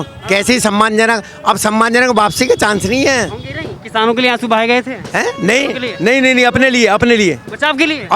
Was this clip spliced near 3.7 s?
yes; 1 cut; at 3.7 s

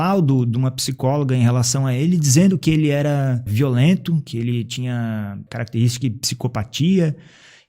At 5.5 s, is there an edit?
yes; 2 cuts; at 3.5 s, 5.5 s

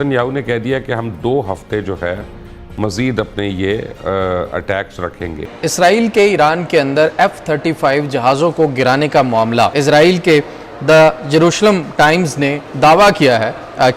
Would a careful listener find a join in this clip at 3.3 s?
no; 2 cuts; at 5.4 s, 9.7 s

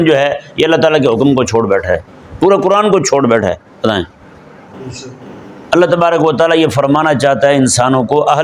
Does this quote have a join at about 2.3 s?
no; 1 cut; at 4.7 s

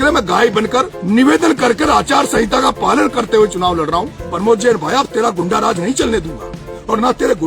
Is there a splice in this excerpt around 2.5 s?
no; 2 cuts; at 0.9 s, 4.2 s

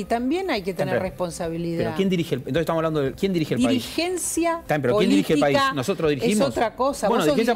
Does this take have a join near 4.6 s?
yes; 2 cuts; at 3.1 s, 4.6 s

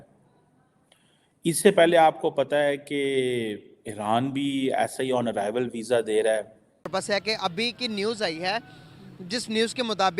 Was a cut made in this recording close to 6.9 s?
yes; 1 cut; at 6.9 s

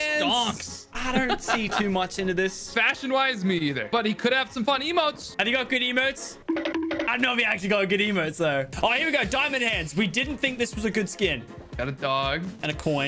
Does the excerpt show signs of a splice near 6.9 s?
no; 3 cuts; at 0.9 s, 2.7 s, 8.7 s

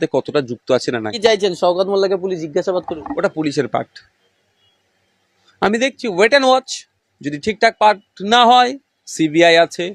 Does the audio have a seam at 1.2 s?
yes; 1 cut; at 1.2 s

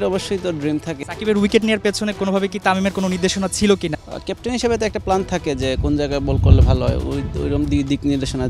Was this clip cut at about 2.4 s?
no; 2 cuts; at 1.0 s, 4.0 s

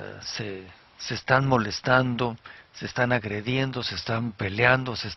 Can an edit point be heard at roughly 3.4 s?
yes; 1 cut; at 3.4 s

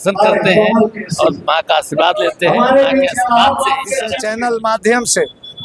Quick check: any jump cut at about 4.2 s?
yes; 1 cut; at 4.2 s

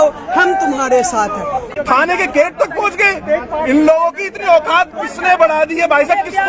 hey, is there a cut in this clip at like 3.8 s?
no; 1 cut; at 1.7 s

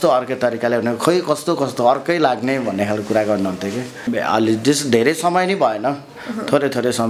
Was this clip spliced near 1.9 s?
no; 1 cut; at 4.1 s

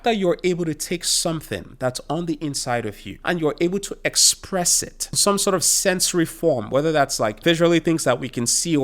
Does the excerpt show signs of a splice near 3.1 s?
yes; 3 cuts; at 3.1 s, 5.2 s, 7.4 s

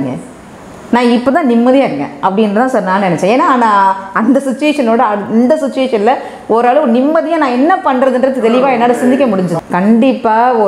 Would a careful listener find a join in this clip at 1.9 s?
no; 1 cut; at 9.5 s

